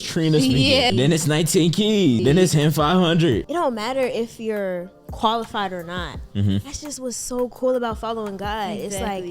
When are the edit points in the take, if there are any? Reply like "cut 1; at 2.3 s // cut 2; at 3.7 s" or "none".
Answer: cut 1; at 0.9 s // cut 2; at 2.2 s // cut 3; at 3.4 s